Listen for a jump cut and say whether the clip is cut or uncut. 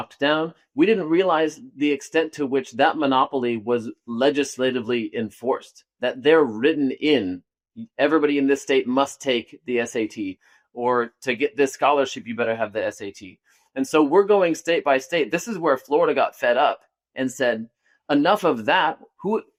uncut